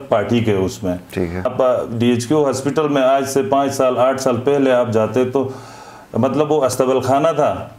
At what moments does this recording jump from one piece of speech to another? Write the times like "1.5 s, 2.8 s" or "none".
1.5 s

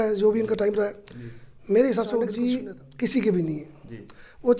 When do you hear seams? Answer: 2.3 s

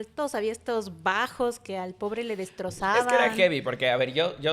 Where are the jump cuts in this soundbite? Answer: none

